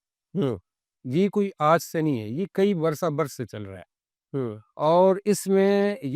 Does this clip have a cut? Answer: no; 0 cuts

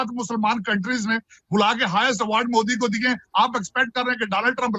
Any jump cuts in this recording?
no; 0 cuts

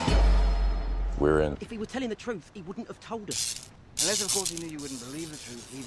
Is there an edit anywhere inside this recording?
yes; 1 cut; at 1.6 s

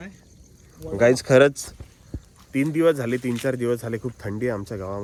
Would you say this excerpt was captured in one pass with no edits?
yes; 0 cuts

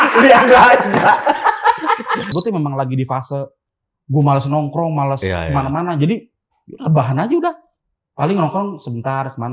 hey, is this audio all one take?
no; 1 cut; at 2.3 s

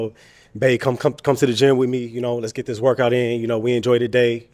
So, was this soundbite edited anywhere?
no; 0 cuts

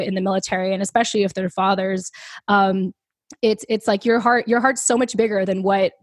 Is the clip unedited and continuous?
yes; 0 cuts

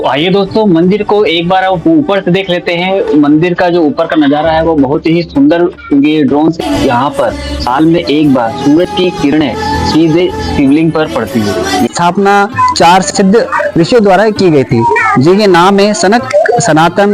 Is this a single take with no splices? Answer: no; 2 cuts; at 6.6 s, 11.9 s

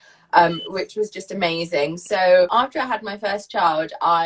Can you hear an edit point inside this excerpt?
no; 0 cuts

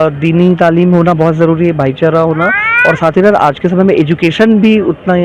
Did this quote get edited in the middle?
no; 0 cuts

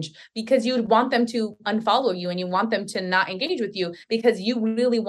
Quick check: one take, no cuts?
yes; 0 cuts

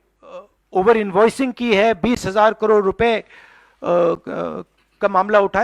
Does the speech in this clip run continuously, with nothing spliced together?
yes; 0 cuts

